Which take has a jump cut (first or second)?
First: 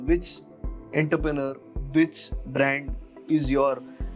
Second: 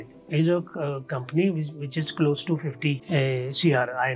second